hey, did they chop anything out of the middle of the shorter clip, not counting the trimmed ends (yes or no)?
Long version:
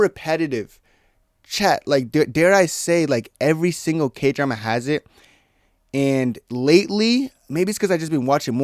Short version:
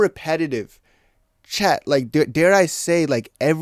no